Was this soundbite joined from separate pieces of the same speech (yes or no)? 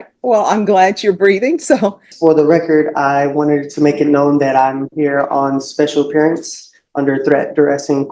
yes